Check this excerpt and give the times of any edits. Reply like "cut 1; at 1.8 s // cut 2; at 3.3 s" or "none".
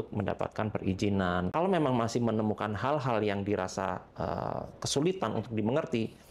cut 1; at 1.5 s